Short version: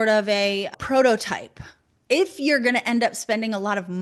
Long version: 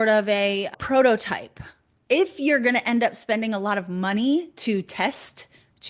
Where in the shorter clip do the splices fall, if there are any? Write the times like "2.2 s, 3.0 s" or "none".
none